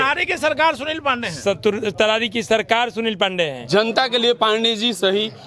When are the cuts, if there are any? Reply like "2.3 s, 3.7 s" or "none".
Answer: 3.6 s